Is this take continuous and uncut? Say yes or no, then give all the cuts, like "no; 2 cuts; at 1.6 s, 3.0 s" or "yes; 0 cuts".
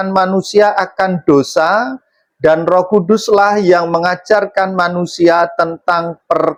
yes; 0 cuts